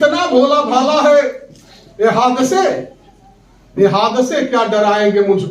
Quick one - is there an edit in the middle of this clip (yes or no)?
no